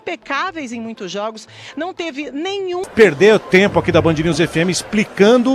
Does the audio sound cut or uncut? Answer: cut